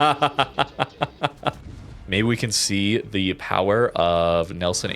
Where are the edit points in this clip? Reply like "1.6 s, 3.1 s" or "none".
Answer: 1.7 s